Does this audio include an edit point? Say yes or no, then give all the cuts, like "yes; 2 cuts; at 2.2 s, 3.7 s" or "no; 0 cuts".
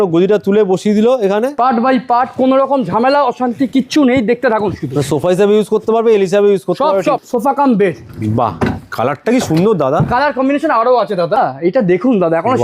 yes; 3 cuts; at 1.5 s, 7.2 s, 11.4 s